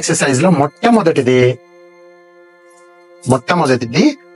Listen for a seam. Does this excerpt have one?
no; 0 cuts

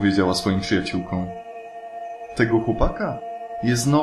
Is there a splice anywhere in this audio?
no; 0 cuts

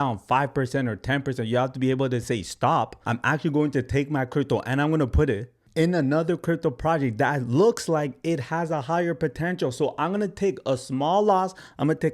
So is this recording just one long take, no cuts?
yes; 0 cuts

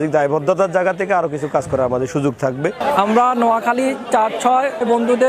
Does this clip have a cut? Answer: yes; 1 cut; at 2.8 s

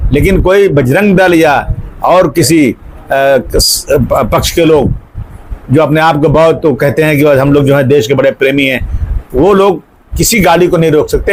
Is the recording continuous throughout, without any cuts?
yes; 0 cuts

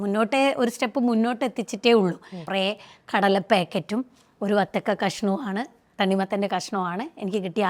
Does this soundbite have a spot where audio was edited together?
yes; 1 cut; at 2.4 s

